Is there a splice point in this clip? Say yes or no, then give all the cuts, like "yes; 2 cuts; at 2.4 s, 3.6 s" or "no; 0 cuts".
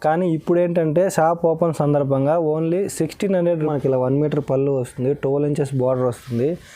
yes; 1 cut; at 3.6 s